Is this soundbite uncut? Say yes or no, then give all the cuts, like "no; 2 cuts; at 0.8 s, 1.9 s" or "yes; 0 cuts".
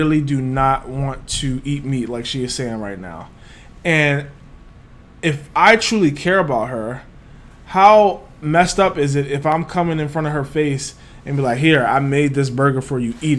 yes; 0 cuts